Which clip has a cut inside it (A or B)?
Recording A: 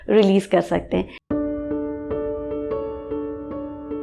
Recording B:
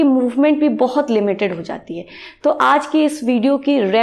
A